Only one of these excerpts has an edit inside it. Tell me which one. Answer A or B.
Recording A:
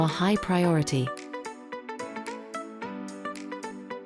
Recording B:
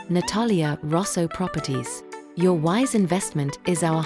A